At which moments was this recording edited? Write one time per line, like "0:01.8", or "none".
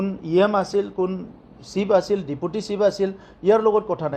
none